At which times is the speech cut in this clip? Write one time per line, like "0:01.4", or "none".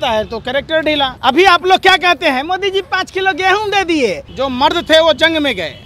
0:01.1
0:04.2